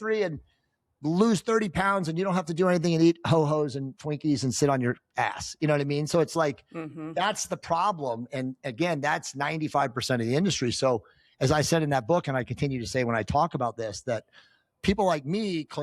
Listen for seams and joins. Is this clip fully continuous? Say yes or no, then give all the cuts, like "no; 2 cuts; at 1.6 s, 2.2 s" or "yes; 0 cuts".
yes; 0 cuts